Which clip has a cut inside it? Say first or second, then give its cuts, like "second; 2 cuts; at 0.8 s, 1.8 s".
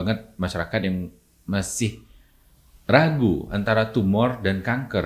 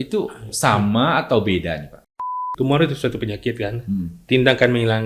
second; 1 cut; at 2.4 s